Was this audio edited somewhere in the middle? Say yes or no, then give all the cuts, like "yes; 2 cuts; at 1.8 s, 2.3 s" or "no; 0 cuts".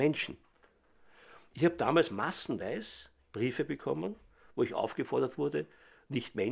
yes; 1 cut; at 5.5 s